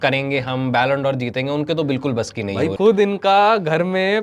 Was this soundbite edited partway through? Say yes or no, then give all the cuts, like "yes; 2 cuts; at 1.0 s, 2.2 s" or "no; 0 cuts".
yes; 1 cut; at 2.7 s